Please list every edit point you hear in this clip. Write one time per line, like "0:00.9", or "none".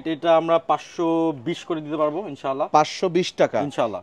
none